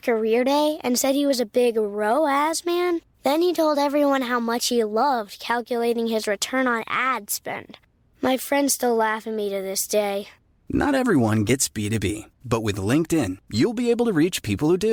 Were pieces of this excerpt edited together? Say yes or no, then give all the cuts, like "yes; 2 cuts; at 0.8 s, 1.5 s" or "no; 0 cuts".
no; 0 cuts